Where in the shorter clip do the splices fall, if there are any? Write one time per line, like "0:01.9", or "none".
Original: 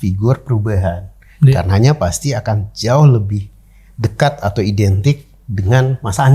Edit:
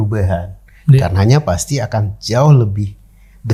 none